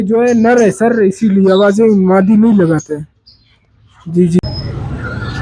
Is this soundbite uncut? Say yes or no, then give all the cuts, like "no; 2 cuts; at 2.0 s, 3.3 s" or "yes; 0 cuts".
no; 1 cut; at 4.5 s